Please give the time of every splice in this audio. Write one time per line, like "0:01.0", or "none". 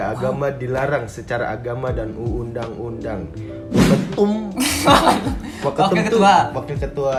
none